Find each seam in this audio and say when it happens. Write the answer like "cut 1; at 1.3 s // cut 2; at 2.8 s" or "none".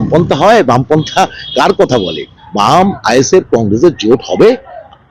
cut 1; at 2.4 s